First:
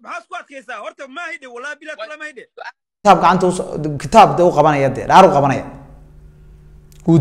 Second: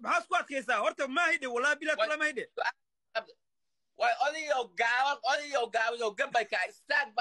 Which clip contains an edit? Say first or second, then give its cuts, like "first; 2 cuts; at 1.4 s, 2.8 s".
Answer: first; 1 cut; at 2.8 s